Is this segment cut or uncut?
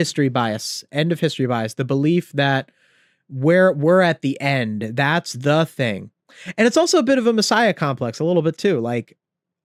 uncut